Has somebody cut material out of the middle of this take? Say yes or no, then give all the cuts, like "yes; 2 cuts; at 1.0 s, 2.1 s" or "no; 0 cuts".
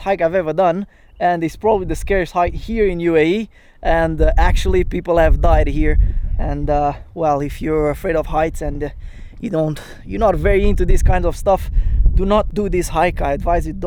no; 0 cuts